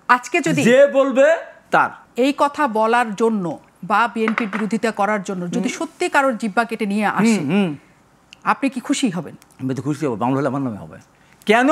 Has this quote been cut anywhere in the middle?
yes; 1 cut; at 2.0 s

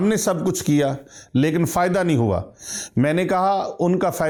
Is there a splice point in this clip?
no; 0 cuts

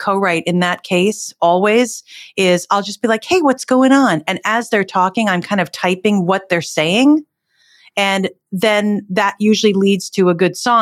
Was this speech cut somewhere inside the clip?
no; 0 cuts

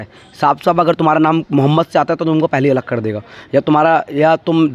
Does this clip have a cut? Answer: no; 0 cuts

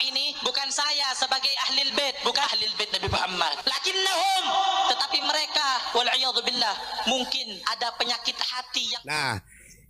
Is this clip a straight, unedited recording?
no; 1 cut; at 2.5 s

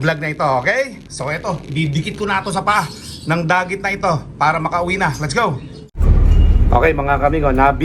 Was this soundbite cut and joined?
no; 0 cuts

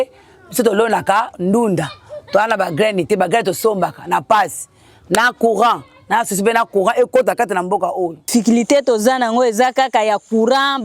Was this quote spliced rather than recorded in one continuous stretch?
yes; 1 cut; at 8.2 s

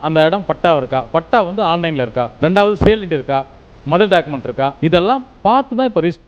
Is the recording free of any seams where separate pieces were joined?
no; 2 cuts; at 2.3 s, 4.7 s

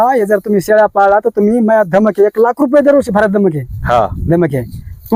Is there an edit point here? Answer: no; 0 cuts

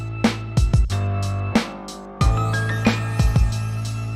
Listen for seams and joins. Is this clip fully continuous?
no; 1 cut; at 2.1 s

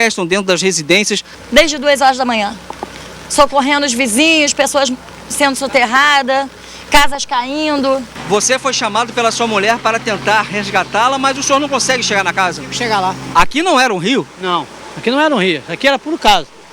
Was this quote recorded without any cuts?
no; 3 cuts; at 1.3 s, 8.1 s, 13.2 s

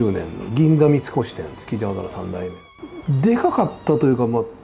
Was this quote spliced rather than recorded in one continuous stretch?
yes; 1 cut; at 2.6 s

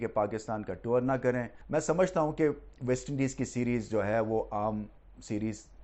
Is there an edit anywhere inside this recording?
yes; 1 cut; at 1.5 s

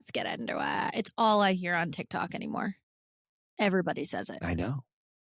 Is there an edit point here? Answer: no; 0 cuts

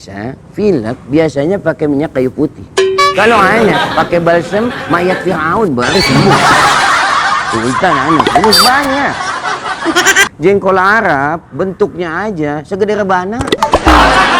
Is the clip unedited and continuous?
no; 1 cut; at 10.3 s

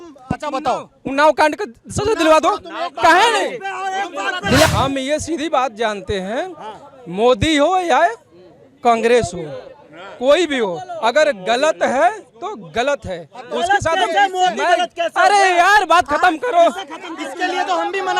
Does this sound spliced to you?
yes; 1 cut; at 4.7 s

